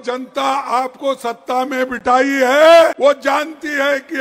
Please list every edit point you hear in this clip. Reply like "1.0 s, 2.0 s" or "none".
2.9 s